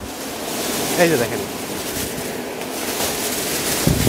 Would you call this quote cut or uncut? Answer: uncut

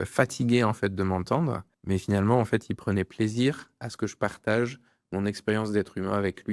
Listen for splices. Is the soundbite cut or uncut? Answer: cut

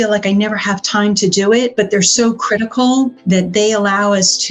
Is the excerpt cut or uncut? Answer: cut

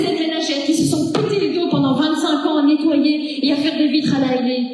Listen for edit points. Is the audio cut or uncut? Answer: uncut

